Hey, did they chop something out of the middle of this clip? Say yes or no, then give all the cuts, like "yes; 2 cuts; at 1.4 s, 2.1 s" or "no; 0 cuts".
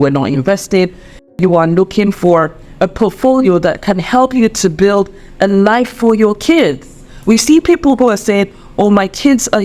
yes; 1 cut; at 1.3 s